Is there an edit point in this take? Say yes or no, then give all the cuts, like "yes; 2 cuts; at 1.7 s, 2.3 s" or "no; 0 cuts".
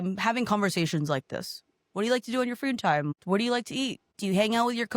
yes; 2 cuts; at 3.2 s, 4.1 s